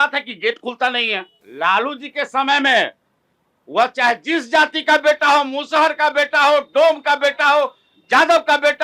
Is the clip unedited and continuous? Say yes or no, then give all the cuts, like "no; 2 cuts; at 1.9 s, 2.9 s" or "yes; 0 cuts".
no; 1 cut; at 1.4 s